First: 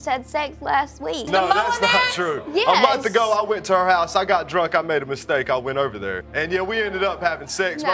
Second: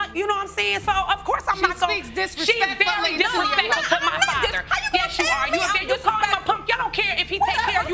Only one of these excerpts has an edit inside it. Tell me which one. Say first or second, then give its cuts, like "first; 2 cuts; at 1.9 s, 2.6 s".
first; 2 cuts; at 1.3 s, 6.2 s